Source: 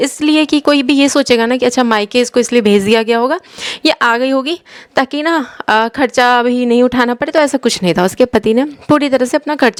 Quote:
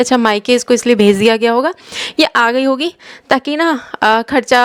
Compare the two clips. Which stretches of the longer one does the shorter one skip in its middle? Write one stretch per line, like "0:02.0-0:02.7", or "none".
none

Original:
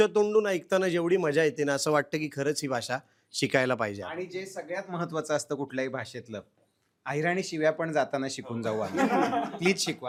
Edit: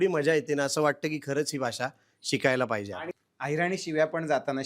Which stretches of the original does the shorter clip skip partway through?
0:04.2-0:06.8

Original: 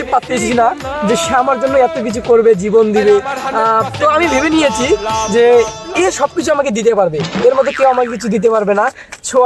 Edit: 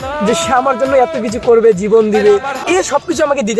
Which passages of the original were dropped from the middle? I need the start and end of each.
0:03.4-0:05.8

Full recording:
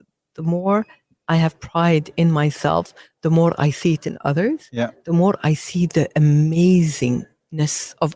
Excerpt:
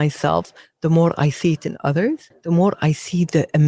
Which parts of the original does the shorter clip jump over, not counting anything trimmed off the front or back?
0:04.7-0:04.9

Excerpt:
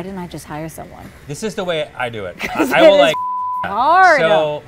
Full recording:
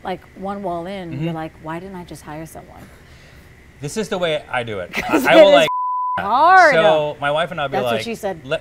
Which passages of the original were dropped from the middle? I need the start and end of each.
0:02.8-0:03.6

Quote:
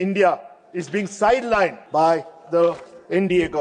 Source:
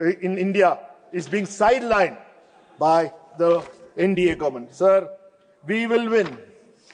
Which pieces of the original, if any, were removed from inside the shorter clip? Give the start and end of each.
0:02.2-0:02.7

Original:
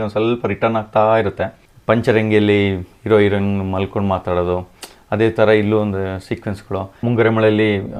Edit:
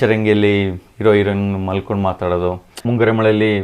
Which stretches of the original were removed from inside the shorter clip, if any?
0:04.8-0:06.9

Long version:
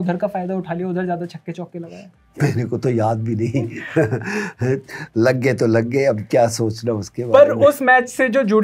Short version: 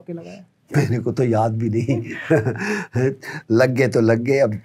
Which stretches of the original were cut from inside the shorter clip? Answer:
none

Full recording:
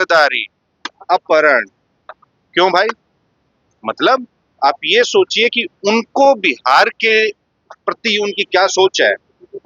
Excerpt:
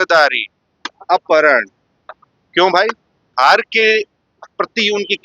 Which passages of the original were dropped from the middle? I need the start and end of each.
0:03.3-0:06.6

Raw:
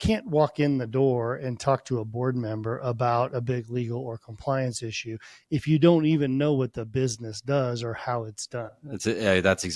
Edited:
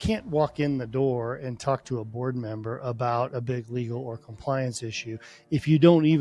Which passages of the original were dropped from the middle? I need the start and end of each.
none

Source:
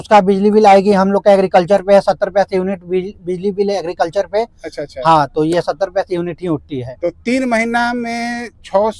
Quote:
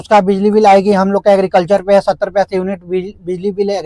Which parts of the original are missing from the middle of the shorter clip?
none

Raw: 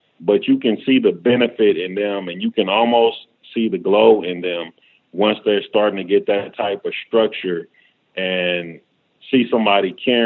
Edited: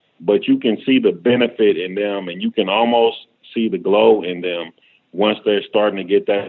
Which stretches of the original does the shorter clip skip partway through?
none

